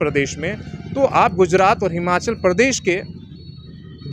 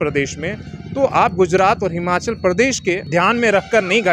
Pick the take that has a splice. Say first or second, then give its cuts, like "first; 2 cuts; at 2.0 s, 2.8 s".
second; 1 cut; at 3.0 s